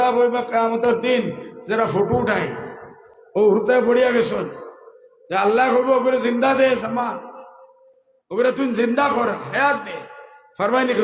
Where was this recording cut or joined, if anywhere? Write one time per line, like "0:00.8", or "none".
none